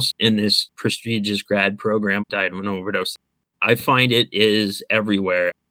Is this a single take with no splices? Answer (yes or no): yes